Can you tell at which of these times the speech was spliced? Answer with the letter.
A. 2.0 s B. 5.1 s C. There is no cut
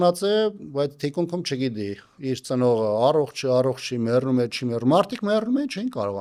C